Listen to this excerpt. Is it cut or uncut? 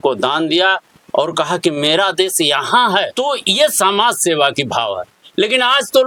uncut